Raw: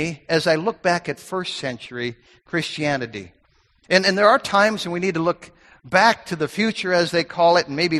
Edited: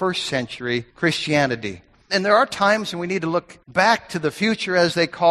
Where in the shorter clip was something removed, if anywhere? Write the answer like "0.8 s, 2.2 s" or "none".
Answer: 0.9 s, 2.1 s, 3.6 s